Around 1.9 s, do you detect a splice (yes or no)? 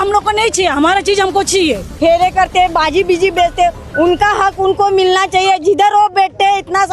yes